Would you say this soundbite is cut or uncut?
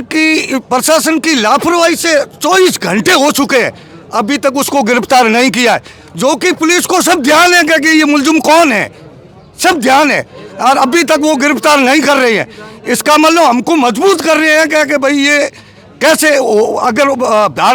uncut